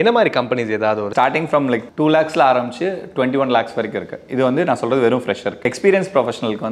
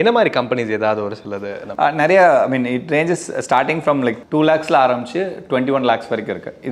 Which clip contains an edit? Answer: first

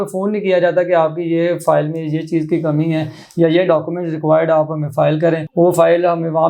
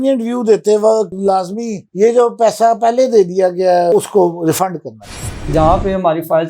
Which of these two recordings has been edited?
second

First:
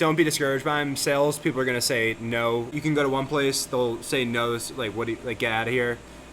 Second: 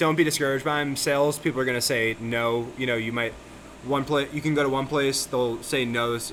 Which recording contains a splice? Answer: first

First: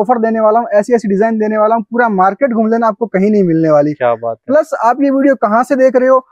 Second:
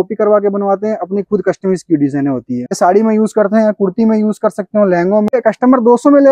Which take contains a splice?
second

